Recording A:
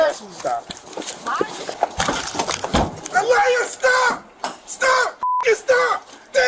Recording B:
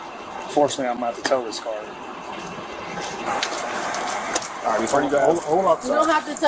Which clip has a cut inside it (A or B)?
A